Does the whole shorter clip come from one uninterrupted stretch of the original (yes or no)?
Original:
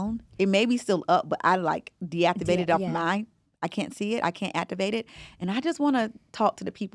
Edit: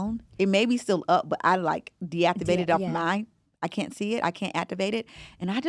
yes